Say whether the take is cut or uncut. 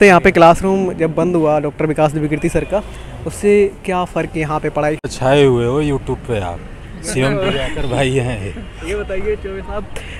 cut